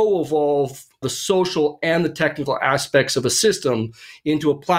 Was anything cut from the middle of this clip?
yes; 1 cut; at 1.0 s

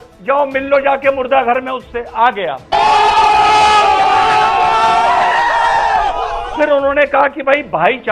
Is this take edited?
yes; 1 cut; at 6.4 s

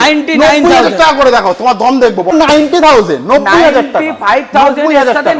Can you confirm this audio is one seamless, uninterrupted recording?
no; 1 cut; at 2.3 s

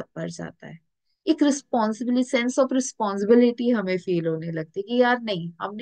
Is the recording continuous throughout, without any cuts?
yes; 0 cuts

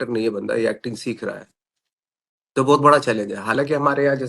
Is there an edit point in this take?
no; 0 cuts

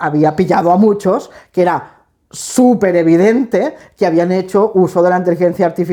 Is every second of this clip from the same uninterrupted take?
yes; 0 cuts

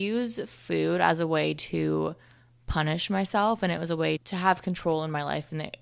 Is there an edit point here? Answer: no; 0 cuts

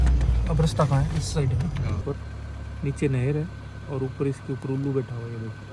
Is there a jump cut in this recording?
yes; 1 cut; at 2.0 s

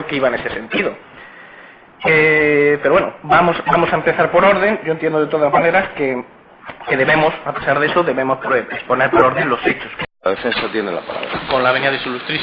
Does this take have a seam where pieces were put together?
no; 0 cuts

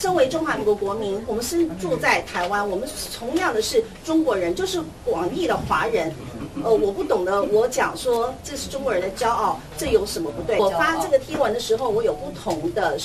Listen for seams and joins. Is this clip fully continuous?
no; 1 cut; at 10.6 s

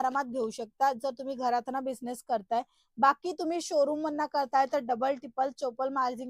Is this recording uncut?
yes; 0 cuts

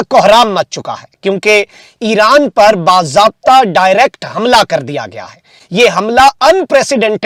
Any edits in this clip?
no; 0 cuts

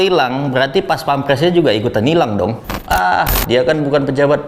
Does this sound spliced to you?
yes; 1 cut; at 2.7 s

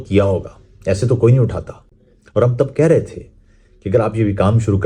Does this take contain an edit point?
no; 0 cuts

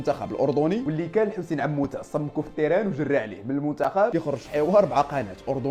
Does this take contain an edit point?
no; 0 cuts

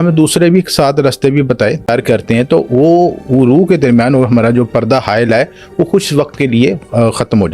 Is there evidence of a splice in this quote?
yes; 1 cut; at 1.9 s

